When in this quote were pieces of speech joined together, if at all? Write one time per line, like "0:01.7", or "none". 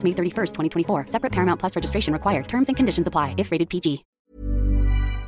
0:04.1